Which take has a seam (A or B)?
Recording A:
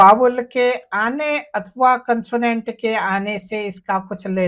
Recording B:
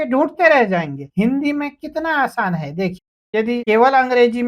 B